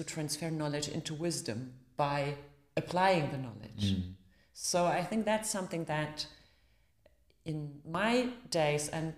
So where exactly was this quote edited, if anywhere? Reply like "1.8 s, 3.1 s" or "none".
none